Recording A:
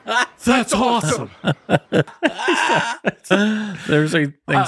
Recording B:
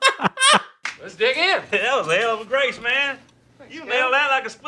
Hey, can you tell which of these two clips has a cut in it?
A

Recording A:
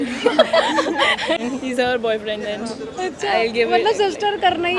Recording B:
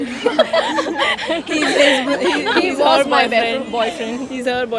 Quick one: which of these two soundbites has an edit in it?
A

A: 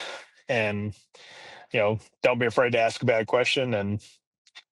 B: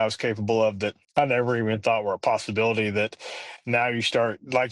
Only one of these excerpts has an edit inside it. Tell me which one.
B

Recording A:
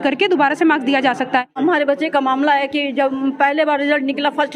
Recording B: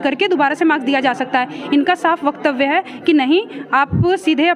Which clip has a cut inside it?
A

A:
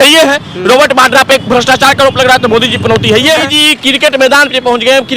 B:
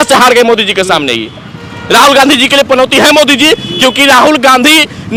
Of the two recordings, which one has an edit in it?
A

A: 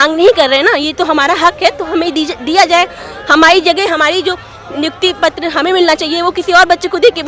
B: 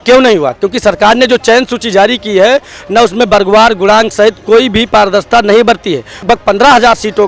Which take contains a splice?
B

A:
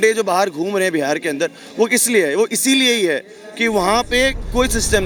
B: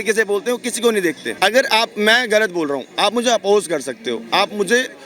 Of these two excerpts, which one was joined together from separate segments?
B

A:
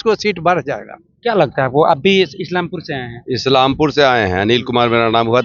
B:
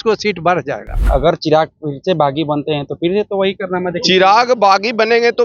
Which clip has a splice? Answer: B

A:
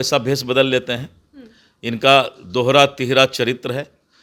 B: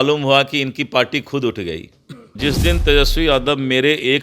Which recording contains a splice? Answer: B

